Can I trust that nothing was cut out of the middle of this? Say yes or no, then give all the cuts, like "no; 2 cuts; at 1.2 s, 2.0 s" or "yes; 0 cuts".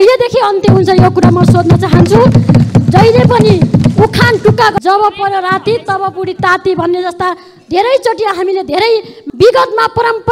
no; 2 cuts; at 4.8 s, 9.2 s